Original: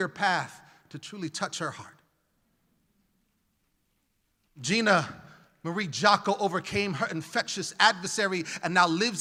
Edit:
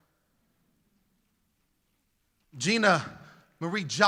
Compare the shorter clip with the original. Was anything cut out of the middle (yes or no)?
no